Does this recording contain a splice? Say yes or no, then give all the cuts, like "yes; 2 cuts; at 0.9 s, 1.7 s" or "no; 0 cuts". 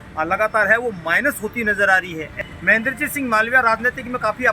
yes; 1 cut; at 2.4 s